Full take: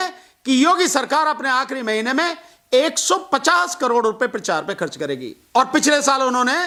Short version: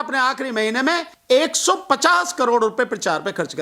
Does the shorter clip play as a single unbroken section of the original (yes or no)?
no